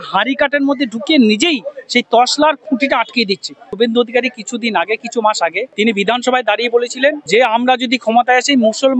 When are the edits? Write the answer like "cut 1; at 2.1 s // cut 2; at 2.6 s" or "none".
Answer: cut 1; at 3.7 s // cut 2; at 5.6 s // cut 3; at 7.2 s

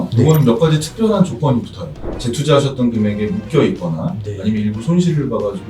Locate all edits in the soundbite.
cut 1; at 2.1 s

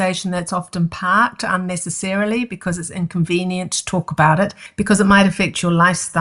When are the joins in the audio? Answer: cut 1; at 4.6 s

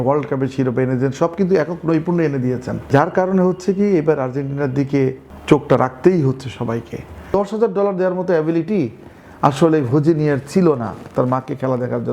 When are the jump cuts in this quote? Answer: cut 1; at 2.9 s // cut 2; at 5.3 s // cut 3; at 7.3 s

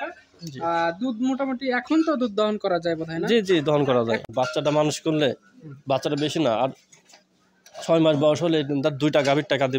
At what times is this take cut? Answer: cut 1; at 4.3 s

